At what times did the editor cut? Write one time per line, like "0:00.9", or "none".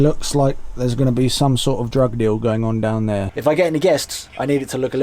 0:03.3